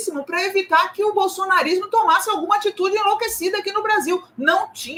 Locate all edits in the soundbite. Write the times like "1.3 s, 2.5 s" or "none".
none